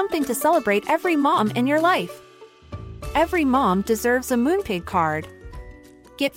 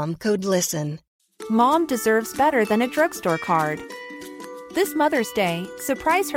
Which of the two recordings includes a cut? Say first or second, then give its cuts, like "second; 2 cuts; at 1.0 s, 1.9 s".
second; 1 cut; at 1.0 s